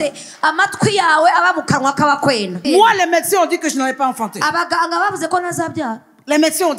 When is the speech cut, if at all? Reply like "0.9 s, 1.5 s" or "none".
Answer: 2.6 s